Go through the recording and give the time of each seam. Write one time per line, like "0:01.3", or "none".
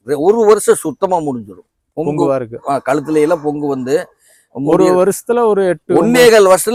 none